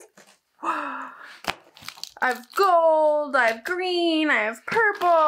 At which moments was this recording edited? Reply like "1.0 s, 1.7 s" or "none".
none